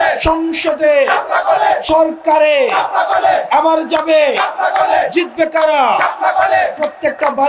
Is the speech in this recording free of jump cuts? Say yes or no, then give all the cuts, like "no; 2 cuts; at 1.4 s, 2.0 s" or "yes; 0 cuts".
yes; 0 cuts